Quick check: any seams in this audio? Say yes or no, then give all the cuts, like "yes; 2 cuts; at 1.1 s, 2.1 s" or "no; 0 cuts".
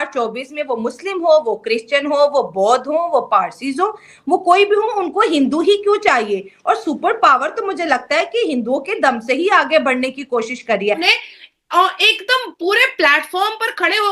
yes; 1 cut; at 11.0 s